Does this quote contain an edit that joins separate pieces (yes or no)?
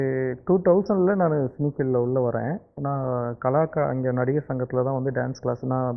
no